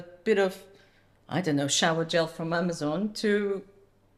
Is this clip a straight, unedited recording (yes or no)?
yes